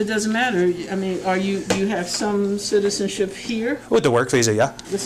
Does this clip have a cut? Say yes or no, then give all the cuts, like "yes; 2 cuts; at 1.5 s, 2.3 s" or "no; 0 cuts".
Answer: no; 0 cuts